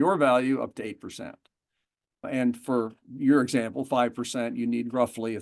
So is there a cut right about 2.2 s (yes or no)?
yes